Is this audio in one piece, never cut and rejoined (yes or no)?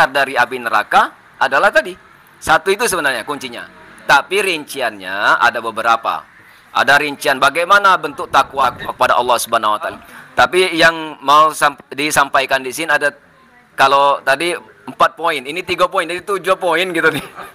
no